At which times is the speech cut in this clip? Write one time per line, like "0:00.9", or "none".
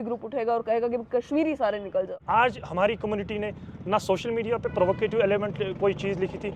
0:02.2

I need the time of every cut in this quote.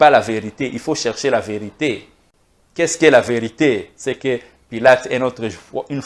none

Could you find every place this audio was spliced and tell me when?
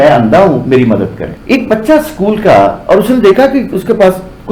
0:01.3

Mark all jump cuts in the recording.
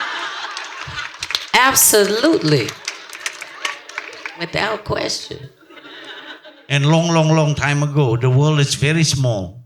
0:04.3

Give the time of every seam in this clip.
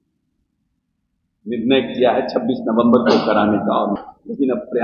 0:03.9

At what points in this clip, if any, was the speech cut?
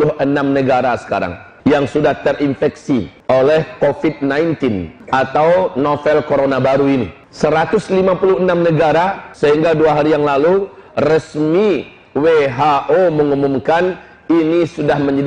0:01.4
0:03.1
0:04.9
0:07.2
0:09.2

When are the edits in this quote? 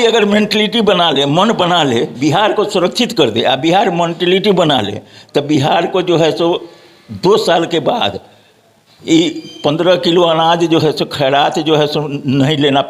none

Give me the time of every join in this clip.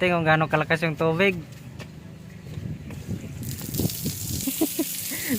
0:04.4

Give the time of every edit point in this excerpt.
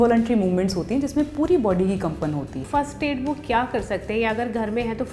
0:02.6

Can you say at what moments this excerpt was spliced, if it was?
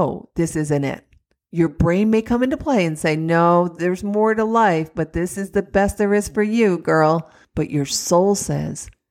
0:07.4

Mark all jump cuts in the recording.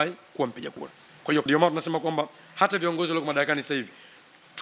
0:01.5

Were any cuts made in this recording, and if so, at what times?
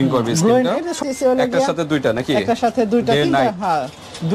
0:00.9

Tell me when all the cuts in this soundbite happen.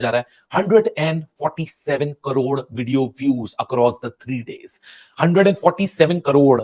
none

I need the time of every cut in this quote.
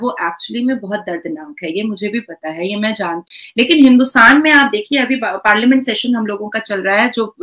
0:03.4

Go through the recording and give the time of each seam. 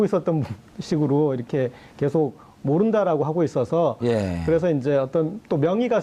0:01.4

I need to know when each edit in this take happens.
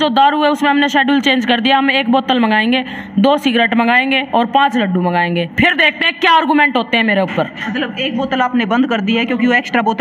none

